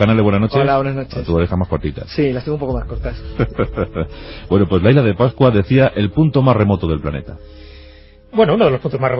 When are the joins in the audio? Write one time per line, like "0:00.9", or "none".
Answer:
0:02.1